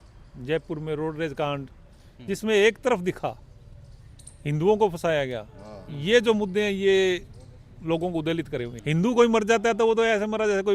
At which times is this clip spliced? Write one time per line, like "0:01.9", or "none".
0:08.7

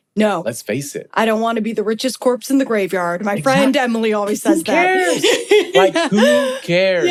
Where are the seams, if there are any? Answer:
none

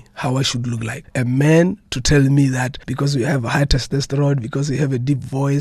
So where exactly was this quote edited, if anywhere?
0:01.0
0:02.8

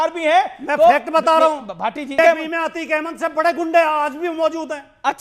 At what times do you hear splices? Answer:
0:02.2

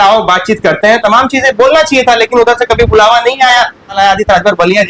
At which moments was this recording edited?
0:04.0

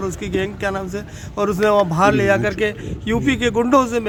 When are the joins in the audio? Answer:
none

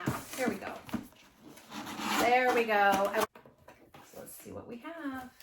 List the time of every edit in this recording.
0:03.3

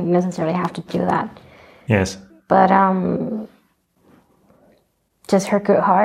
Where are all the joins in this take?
0:04.0

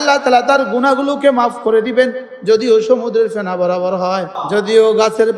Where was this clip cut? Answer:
0:04.4

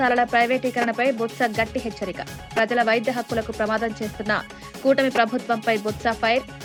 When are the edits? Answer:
none

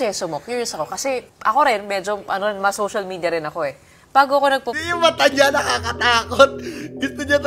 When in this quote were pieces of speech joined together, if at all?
0:01.3

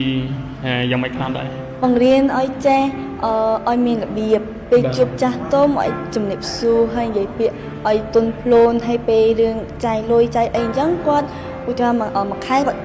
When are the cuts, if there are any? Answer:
none

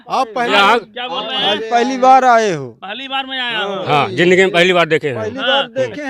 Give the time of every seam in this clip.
none

